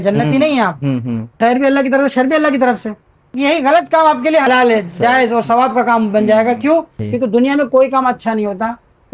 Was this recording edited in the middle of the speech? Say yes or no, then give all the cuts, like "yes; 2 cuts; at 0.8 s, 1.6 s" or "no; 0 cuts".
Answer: yes; 4 cuts; at 1.3 s, 3.3 s, 4.5 s, 7.0 s